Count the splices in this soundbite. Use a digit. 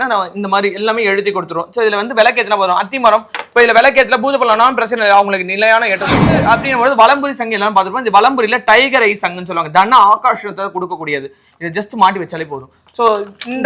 1